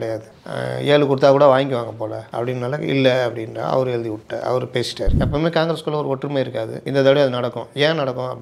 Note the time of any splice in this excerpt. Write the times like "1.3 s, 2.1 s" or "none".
5.1 s